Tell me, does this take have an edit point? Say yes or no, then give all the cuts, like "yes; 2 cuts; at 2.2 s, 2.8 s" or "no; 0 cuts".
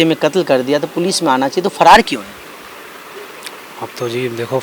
no; 0 cuts